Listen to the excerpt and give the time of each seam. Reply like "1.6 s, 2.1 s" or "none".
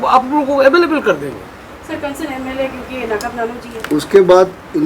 3.6 s